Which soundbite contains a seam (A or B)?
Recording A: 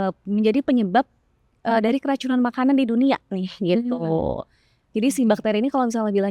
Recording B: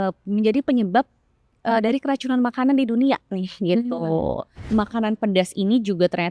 B